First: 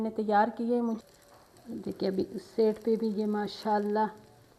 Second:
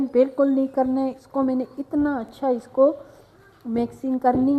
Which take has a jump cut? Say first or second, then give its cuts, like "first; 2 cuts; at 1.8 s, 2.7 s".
first; 1 cut; at 1.0 s